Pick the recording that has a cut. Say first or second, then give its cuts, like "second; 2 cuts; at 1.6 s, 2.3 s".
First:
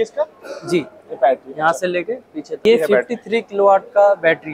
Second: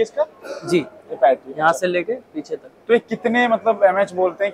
first; 1 cut; at 2.6 s